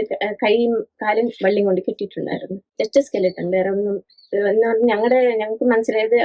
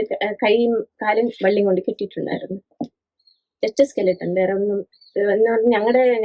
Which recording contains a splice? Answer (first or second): first